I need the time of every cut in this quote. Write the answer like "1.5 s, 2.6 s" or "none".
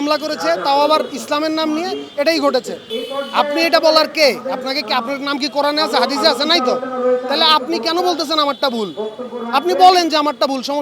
2.8 s